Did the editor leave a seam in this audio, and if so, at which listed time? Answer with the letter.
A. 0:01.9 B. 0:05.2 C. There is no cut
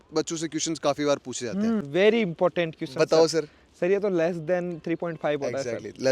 A